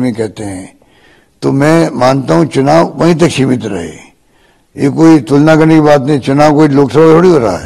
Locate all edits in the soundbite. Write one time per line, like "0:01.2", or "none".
none